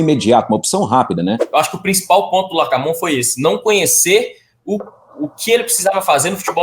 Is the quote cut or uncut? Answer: cut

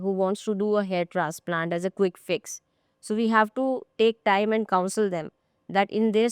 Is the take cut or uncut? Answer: uncut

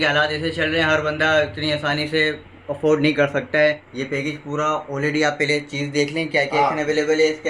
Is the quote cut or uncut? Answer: cut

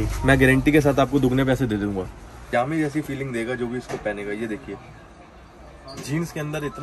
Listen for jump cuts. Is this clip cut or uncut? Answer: cut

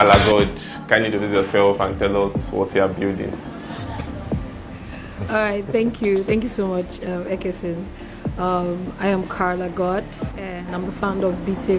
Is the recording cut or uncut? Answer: uncut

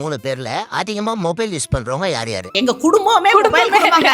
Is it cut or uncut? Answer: cut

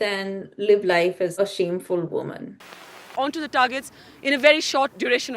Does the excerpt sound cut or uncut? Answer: cut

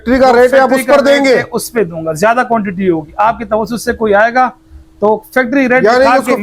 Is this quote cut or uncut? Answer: uncut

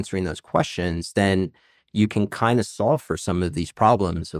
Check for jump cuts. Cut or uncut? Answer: uncut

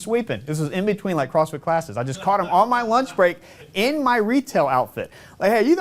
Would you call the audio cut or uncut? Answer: uncut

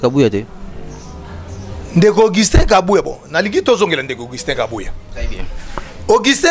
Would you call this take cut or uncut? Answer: uncut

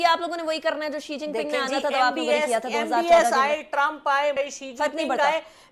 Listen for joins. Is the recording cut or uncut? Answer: uncut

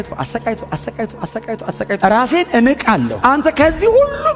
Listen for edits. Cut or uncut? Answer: cut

